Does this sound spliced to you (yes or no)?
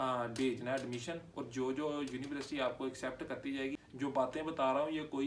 yes